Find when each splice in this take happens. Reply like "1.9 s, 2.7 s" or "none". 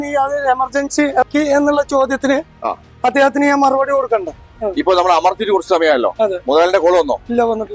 1.3 s, 4.5 s